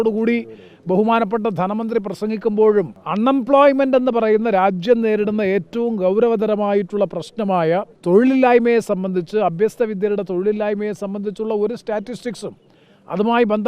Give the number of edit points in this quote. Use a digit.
2